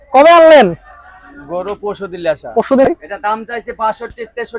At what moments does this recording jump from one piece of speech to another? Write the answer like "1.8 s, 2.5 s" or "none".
2.8 s